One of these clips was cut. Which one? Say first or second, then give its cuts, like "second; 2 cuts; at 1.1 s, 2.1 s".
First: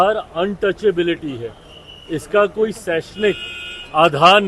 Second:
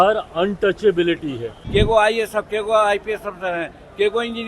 second; 1 cut; at 1.5 s